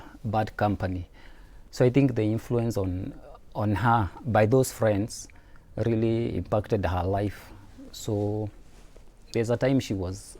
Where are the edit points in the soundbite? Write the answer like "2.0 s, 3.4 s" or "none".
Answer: none